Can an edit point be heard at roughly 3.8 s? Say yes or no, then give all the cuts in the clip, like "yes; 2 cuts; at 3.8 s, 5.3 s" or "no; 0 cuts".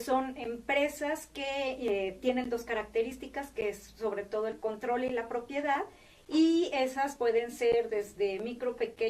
no; 1 cut; at 5.5 s